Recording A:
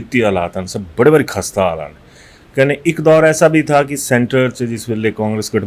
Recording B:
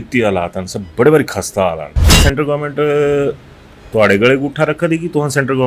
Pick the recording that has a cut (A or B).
B